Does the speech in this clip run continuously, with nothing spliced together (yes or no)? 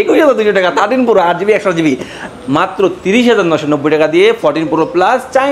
no